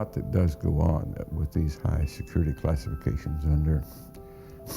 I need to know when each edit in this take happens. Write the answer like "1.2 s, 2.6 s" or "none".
1.8 s